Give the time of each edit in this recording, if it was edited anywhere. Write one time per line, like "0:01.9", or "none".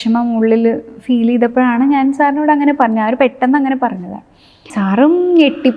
0:04.7